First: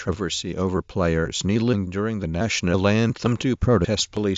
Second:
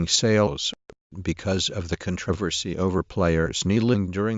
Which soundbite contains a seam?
second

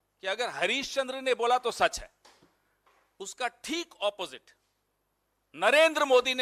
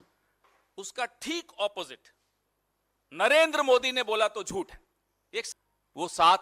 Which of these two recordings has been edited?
second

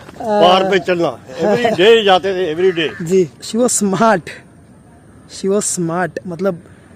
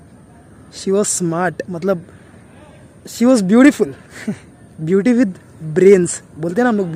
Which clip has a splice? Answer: first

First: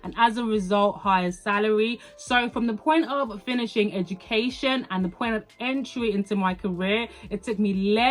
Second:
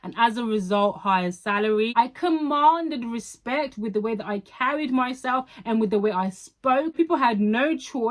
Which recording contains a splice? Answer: second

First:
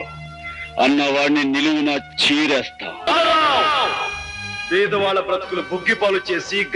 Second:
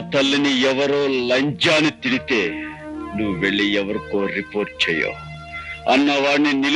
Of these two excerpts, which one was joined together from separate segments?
first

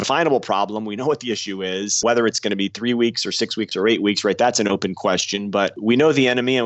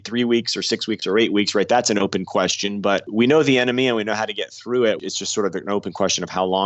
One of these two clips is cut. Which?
second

